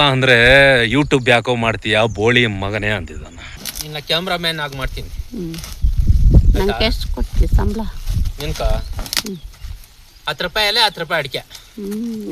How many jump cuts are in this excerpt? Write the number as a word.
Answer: one